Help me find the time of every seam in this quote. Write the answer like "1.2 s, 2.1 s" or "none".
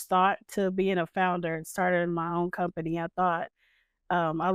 none